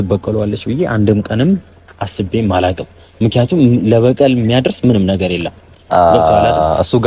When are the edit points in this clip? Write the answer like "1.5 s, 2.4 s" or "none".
none

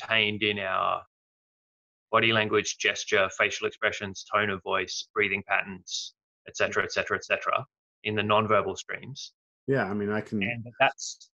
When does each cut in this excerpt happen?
none

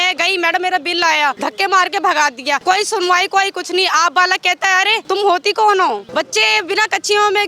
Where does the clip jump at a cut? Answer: 1.4 s, 2.6 s, 5.0 s, 6.0 s

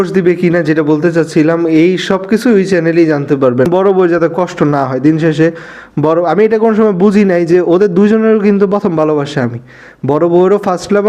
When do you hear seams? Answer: 3.7 s

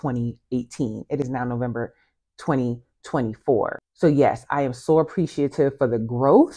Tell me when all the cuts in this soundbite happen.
1.1 s, 3.8 s

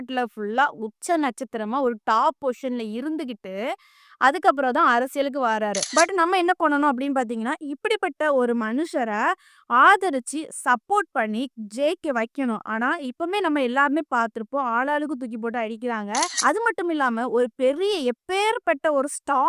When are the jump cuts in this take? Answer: 5.8 s, 16.3 s

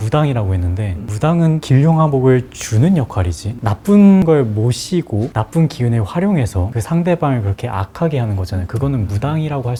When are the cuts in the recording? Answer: none

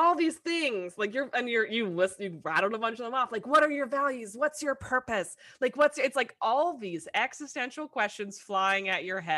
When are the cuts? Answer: none

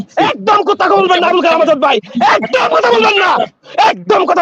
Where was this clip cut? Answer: none

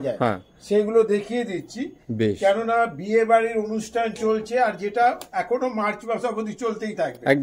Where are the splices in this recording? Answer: none

